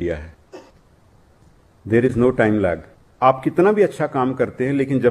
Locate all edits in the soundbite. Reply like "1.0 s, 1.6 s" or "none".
3.0 s